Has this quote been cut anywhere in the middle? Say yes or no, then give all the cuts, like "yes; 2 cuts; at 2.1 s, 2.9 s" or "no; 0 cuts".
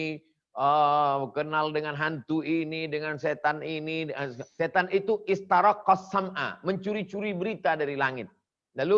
yes; 1 cut; at 4.4 s